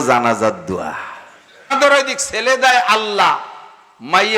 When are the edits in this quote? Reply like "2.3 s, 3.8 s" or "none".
1.7 s